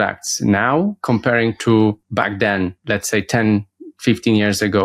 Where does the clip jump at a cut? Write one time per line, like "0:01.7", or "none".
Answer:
0:02.6